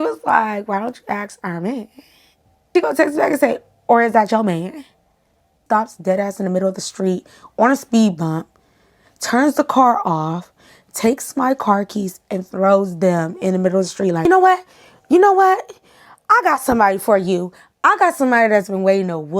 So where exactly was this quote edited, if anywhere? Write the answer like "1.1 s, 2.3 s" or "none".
2.7 s, 5.6 s, 14.2 s